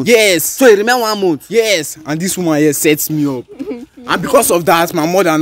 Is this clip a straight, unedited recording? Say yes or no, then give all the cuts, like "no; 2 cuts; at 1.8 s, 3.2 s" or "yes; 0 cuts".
yes; 0 cuts